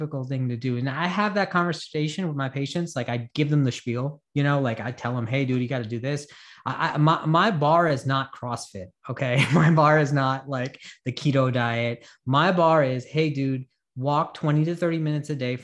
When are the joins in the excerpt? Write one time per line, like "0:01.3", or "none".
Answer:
none